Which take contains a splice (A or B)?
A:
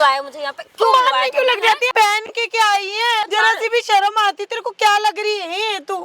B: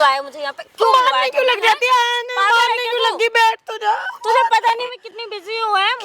A